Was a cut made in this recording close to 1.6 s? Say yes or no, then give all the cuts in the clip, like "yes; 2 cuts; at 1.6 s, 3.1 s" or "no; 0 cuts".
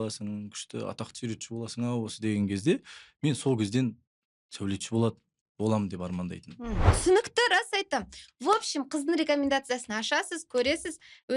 no; 1 cut; at 6.9 s